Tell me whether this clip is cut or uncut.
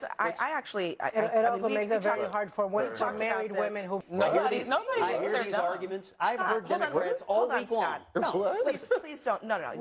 cut